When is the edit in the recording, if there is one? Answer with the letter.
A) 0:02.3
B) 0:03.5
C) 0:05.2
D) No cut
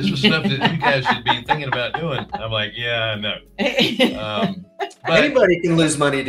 A